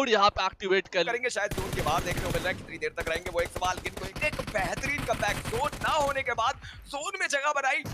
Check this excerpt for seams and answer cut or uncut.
cut